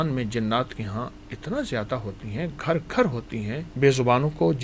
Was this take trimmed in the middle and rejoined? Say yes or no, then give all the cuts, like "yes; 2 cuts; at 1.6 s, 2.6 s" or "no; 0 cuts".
yes; 1 cut; at 3.6 s